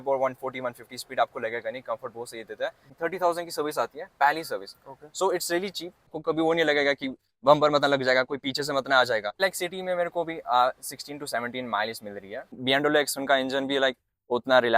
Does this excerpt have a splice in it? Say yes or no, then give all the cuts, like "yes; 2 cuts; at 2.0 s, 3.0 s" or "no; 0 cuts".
yes; 4 cuts; at 2.9 s, 6.2 s, 9.3 s, 12.6 s